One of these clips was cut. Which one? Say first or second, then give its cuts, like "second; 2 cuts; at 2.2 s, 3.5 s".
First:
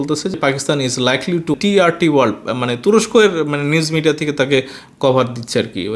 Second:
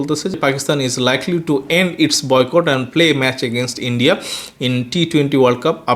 first; 1 cut; at 1.6 s